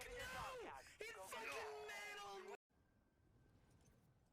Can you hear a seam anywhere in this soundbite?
yes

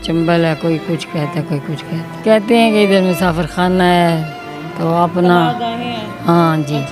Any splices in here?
yes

